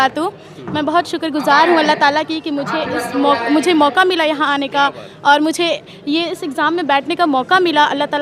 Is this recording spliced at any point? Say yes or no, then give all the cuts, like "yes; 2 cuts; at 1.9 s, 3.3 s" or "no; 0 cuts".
no; 0 cuts